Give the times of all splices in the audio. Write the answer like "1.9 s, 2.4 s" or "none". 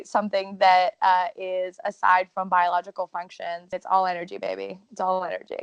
3.6 s